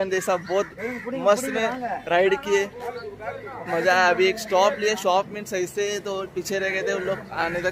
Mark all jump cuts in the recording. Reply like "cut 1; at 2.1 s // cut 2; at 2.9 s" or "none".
none